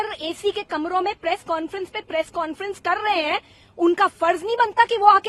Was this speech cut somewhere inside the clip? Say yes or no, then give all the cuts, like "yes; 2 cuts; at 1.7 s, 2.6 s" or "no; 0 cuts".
no; 0 cuts